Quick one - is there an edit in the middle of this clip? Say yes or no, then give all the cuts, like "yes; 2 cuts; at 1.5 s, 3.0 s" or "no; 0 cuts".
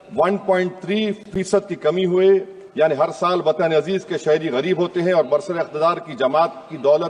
no; 0 cuts